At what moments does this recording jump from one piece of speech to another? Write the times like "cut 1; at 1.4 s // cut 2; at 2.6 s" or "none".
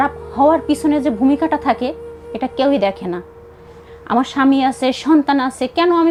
none